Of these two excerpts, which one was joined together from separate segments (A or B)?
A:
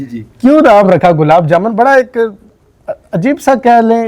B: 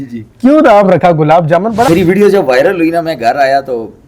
B